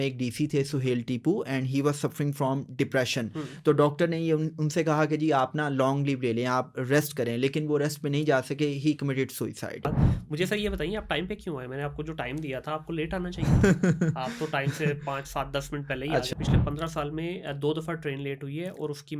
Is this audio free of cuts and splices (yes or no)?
no